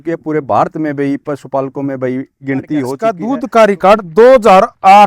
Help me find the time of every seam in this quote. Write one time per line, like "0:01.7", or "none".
0:02.9